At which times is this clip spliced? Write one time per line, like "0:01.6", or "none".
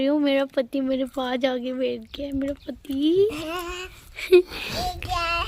none